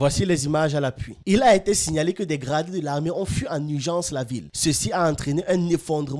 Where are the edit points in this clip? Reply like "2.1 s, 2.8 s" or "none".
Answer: 1.1 s